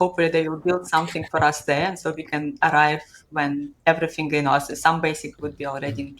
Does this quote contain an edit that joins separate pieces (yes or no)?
no